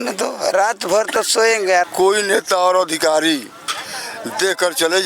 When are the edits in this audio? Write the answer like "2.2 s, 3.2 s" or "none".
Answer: 1.8 s

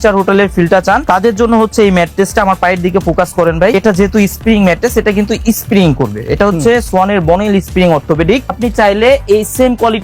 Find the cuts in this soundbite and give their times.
1.0 s, 3.7 s, 8.6 s

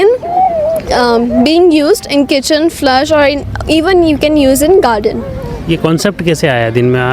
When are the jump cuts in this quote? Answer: none

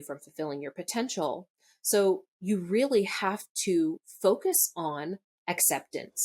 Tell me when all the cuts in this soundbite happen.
5.3 s

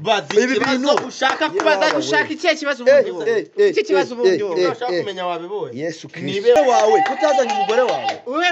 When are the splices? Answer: 6.6 s

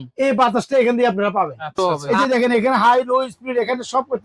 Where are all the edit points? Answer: 1.7 s

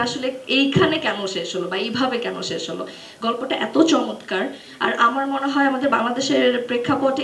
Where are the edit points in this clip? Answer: none

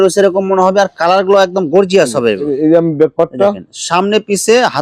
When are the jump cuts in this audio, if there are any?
none

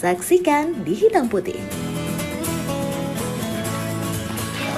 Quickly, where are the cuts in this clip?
none

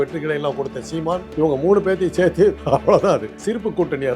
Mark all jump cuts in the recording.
1.3 s, 2.6 s, 3.3 s

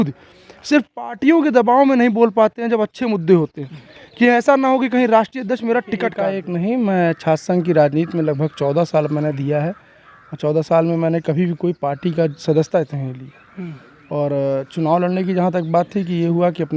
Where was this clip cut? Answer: 6.2 s

